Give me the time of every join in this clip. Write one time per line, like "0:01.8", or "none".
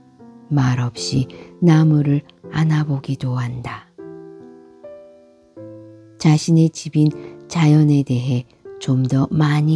0:03.9
0:05.8

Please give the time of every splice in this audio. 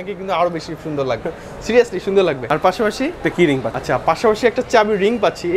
0:03.7

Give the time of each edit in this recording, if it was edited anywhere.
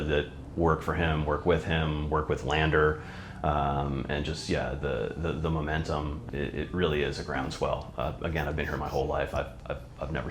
0:06.2

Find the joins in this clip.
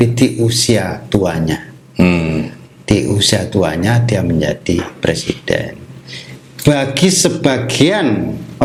none

